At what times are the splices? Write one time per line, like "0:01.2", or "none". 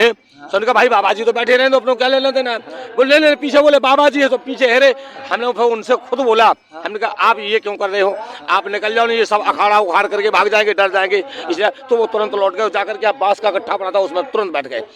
none